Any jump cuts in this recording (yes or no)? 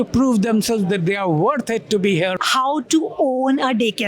yes